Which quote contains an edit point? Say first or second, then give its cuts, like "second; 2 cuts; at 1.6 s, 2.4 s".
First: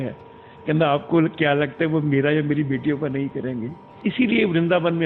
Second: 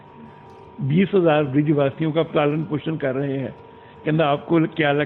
first; 1 cut; at 3.8 s